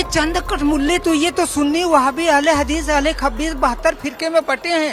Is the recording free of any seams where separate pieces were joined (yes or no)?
yes